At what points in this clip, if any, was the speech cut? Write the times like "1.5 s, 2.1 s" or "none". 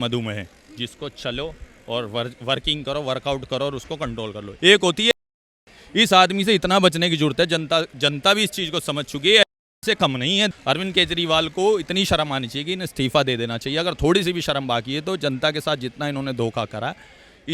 4.4 s, 10.5 s